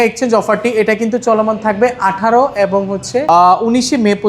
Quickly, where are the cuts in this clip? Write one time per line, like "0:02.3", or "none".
none